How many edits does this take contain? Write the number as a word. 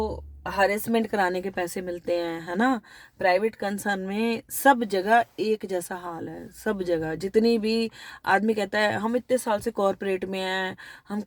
zero